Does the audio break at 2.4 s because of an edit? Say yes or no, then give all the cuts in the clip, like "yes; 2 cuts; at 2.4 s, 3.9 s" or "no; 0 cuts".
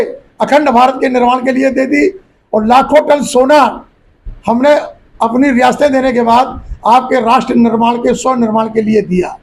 no; 0 cuts